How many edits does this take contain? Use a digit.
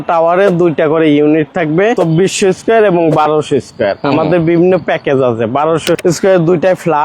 2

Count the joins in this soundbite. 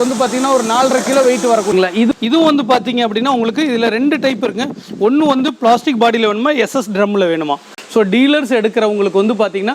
2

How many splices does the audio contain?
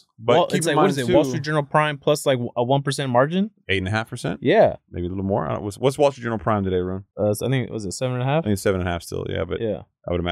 1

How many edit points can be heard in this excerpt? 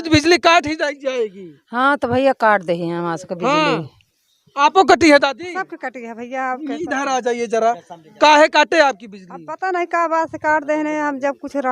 0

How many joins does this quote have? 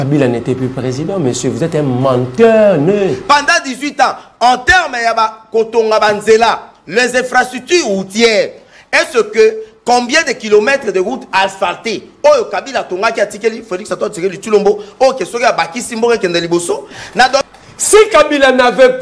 2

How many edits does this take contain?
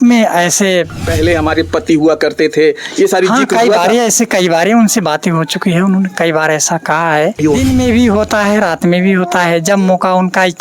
2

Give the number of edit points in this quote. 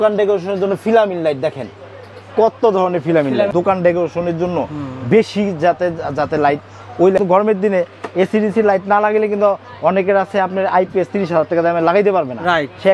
2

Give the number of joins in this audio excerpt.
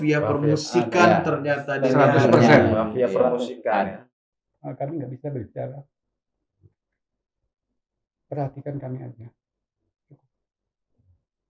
1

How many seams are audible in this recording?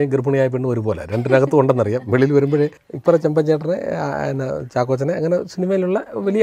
1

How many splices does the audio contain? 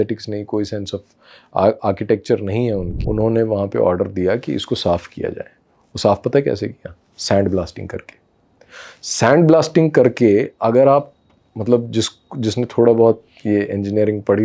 1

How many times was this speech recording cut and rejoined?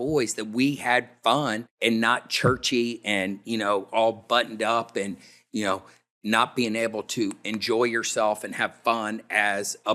1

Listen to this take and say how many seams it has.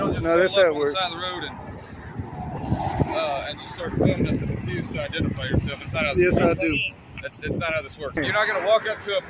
1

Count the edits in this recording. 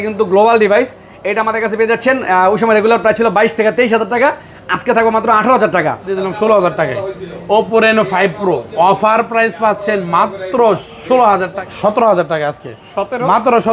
2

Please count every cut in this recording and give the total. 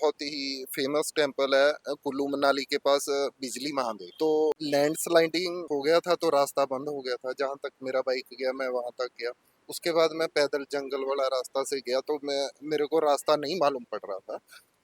0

